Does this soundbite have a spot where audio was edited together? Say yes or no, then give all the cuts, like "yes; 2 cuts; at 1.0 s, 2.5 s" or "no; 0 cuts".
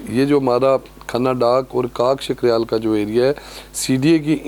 no; 0 cuts